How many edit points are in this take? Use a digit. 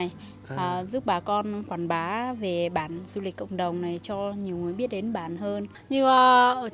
1